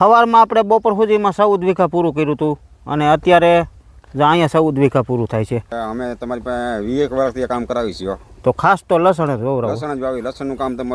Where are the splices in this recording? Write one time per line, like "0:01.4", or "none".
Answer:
0:05.7